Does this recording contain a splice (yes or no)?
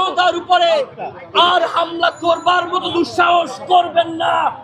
no